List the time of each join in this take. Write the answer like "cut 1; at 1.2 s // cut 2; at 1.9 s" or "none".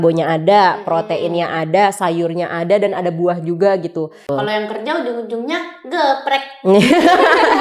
cut 1; at 4.3 s